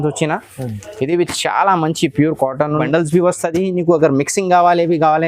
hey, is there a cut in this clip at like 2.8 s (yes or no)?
yes